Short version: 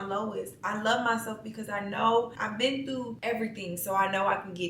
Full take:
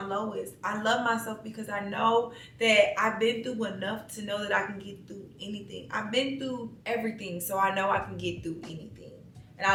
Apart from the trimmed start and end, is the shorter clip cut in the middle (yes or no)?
yes